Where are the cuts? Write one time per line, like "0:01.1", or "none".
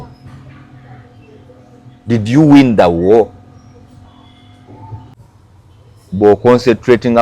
0:05.1